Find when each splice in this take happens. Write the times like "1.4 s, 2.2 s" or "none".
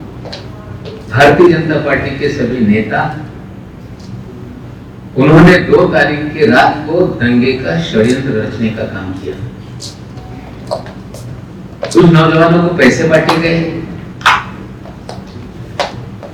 none